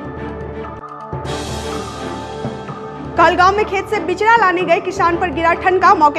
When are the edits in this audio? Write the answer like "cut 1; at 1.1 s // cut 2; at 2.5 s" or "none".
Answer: cut 1; at 2.7 s